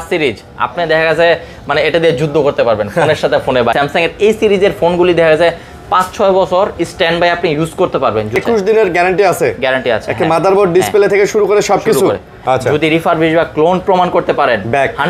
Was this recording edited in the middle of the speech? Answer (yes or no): yes